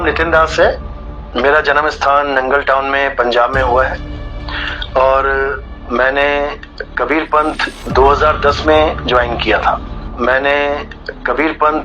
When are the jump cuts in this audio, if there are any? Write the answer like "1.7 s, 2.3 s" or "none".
9.9 s